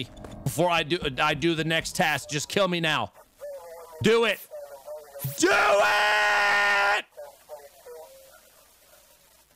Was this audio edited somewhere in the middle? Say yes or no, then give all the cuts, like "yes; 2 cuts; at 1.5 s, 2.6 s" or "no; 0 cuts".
no; 0 cuts